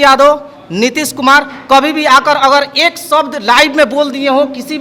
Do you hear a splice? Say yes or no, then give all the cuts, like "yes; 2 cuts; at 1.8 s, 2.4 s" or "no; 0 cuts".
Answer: no; 0 cuts